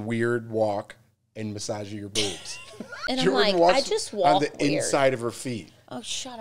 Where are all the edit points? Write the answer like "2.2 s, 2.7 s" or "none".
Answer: 3.0 s

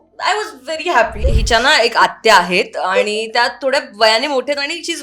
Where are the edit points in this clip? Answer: 1.2 s

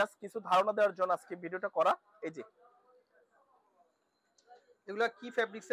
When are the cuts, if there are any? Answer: none

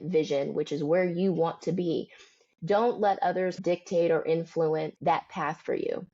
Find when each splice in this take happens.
3.6 s, 4.9 s

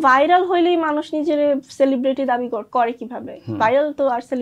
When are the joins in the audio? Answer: none

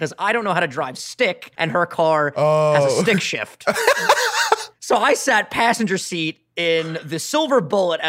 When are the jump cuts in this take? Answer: 1.5 s, 4.7 s

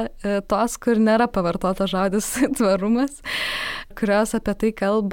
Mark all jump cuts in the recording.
3.9 s

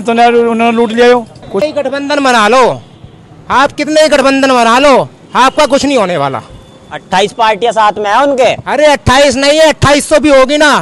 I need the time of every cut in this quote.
1.5 s

